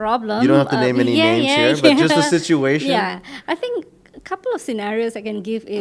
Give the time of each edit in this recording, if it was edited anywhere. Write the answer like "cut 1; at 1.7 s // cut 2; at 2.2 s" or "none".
none